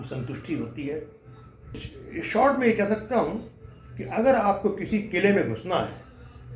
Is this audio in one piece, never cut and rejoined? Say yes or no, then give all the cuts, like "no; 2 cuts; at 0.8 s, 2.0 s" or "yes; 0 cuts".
no; 1 cut; at 1.9 s